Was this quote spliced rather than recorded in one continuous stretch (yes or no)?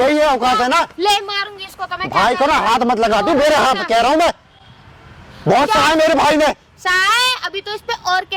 no